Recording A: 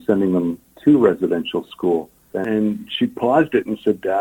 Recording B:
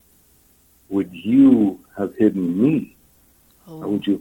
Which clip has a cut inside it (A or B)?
A